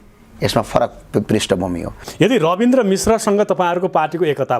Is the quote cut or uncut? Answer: cut